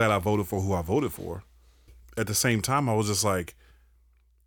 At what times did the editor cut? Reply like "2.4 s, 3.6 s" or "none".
1.9 s